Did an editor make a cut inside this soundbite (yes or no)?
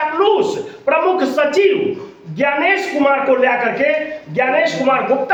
no